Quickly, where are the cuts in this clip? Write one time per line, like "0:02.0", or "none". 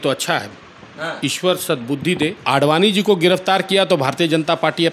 0:02.4